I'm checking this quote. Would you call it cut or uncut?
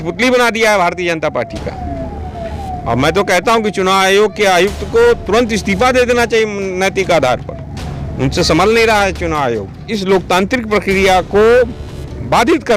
cut